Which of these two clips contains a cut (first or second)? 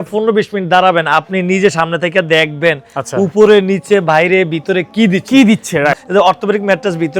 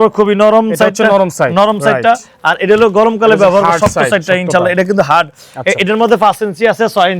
first